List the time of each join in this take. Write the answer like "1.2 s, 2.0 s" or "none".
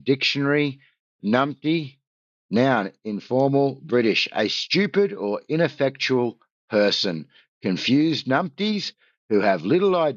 none